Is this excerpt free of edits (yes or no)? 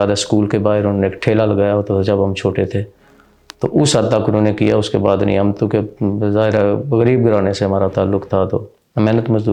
yes